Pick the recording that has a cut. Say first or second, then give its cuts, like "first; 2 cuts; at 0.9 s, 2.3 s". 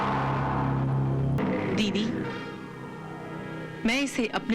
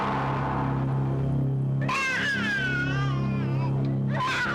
first; 1 cut; at 1.4 s